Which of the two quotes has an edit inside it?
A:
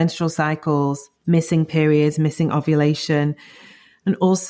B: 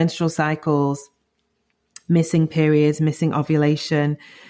A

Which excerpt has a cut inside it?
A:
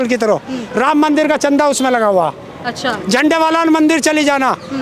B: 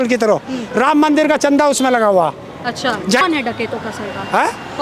B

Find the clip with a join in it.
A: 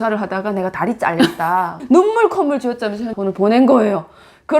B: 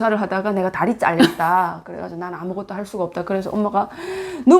A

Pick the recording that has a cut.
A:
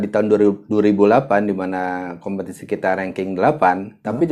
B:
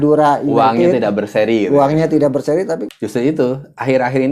B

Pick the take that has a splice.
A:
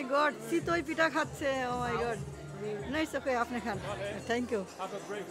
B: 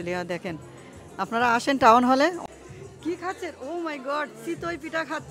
B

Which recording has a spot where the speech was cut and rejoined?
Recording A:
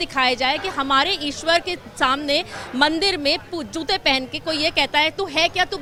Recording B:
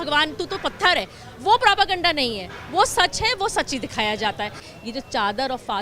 B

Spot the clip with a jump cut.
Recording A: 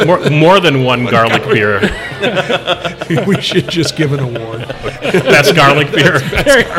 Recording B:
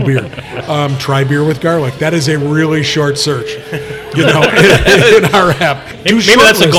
B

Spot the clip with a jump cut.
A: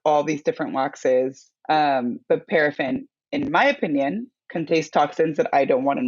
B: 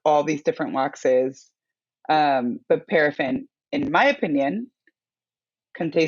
A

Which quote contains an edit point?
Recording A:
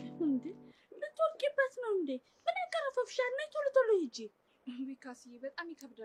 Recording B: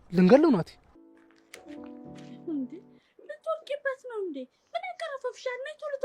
B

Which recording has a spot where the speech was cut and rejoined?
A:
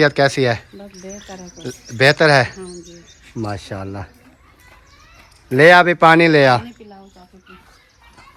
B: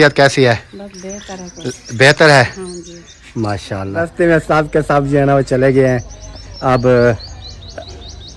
B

